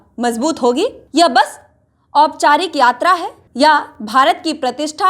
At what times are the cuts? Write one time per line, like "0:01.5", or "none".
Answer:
0:01.0
0:03.4